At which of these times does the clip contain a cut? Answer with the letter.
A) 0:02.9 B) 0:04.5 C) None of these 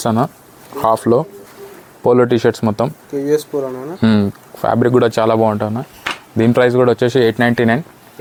C